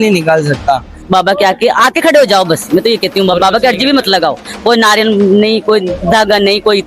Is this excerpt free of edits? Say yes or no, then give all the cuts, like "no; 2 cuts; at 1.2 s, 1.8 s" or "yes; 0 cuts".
no; 1 cut; at 0.9 s